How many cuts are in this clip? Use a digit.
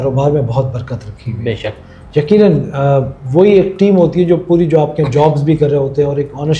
0